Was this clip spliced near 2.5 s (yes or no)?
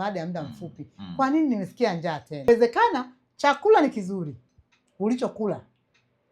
yes